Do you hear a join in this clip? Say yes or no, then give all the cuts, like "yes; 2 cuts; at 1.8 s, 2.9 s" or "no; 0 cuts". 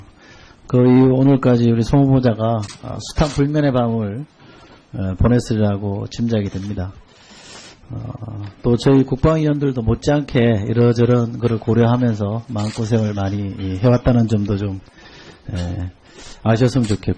no; 0 cuts